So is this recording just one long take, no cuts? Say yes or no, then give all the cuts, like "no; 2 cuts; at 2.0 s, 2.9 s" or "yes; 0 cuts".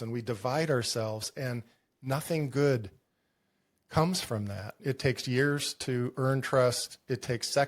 no; 1 cut; at 4.8 s